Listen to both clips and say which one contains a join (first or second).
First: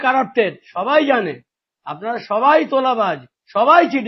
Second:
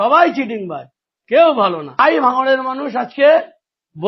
second